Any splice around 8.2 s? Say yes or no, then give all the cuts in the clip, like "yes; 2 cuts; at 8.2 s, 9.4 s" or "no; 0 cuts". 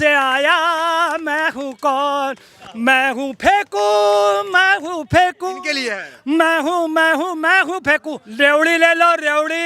yes; 1 cut; at 8.2 s